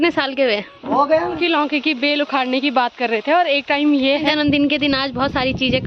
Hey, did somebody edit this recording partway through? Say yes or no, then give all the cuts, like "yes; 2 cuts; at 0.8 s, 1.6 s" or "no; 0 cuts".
yes; 2 cuts; at 1.4 s, 4.2 s